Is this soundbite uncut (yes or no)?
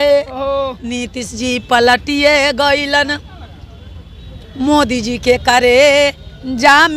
yes